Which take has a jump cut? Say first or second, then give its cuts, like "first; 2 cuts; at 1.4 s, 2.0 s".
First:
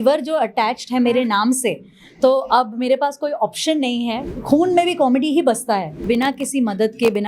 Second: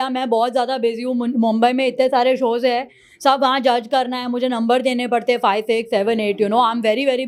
first; 2 cuts; at 4.2 s, 6.0 s